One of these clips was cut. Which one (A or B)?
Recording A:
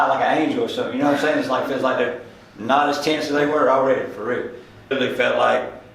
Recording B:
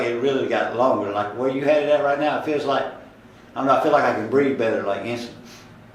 A